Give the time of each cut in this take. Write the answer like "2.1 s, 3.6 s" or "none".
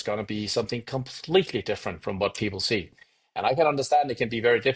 none